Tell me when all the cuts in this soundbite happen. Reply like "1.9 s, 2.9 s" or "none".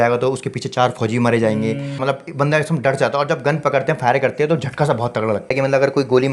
2.0 s, 5.5 s